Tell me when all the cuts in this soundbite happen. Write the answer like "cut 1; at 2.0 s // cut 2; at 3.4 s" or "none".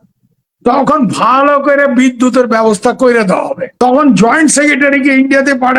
cut 1; at 3.6 s